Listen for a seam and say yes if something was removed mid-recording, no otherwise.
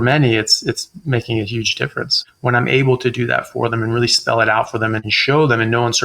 yes